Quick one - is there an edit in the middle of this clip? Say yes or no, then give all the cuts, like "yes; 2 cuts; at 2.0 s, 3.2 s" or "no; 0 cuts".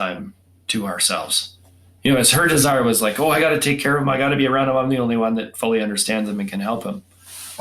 no; 0 cuts